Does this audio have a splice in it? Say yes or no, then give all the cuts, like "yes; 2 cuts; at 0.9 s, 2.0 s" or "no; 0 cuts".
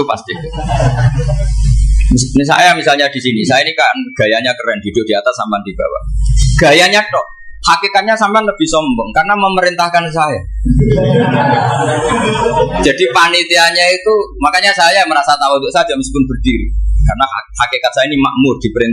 yes; 1 cut; at 1.8 s